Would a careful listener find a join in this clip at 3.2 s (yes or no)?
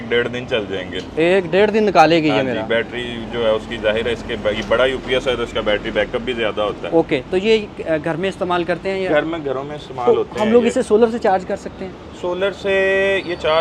no